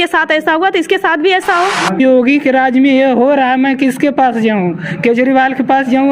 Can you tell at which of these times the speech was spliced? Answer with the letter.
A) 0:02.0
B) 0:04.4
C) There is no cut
A